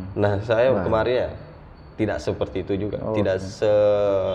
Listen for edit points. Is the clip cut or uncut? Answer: uncut